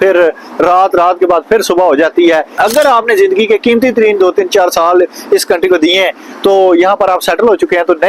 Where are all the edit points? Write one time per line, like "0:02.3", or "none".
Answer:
0:02.5

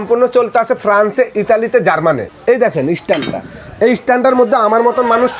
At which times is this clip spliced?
0:02.2

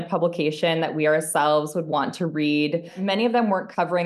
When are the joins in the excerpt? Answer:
0:03.0

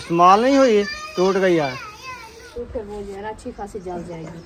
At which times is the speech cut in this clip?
0:02.5

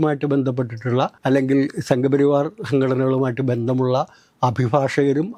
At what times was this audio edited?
none

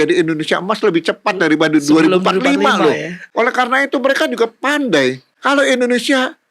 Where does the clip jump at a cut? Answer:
0:03.2
0:05.3

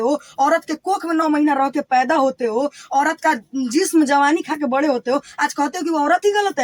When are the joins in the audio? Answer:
none

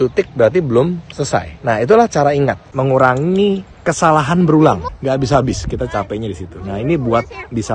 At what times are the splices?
0:01.5
0:02.6
0:04.9

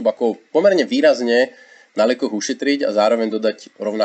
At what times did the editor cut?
none

